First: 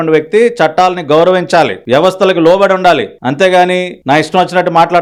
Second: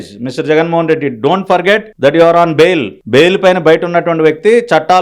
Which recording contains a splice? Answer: second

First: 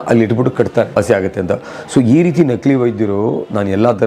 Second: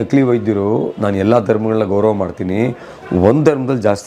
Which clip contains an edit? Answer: first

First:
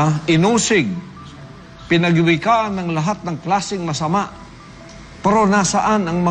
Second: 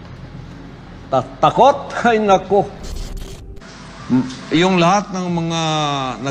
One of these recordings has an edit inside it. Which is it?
second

